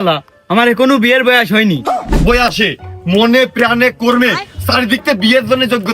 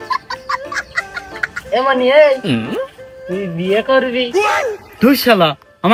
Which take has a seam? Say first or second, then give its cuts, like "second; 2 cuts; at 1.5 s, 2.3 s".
first; 1 cut; at 2.1 s